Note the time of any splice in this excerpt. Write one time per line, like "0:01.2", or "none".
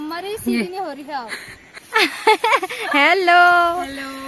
0:01.8